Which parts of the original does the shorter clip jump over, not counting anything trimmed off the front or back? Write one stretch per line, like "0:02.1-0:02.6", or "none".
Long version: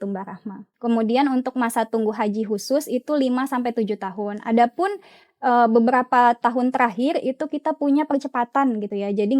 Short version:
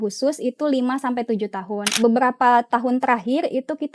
0:04.5-0:05.7